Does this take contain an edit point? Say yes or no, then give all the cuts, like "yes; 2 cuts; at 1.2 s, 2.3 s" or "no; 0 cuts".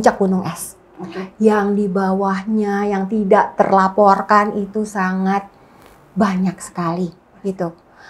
no; 0 cuts